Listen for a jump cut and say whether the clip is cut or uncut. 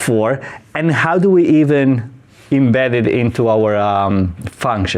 uncut